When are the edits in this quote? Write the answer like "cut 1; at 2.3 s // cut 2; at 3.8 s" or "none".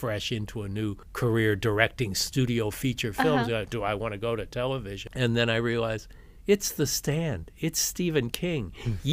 cut 1; at 1.0 s // cut 2; at 5.0 s